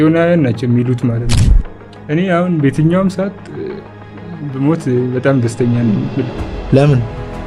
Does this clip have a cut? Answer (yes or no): yes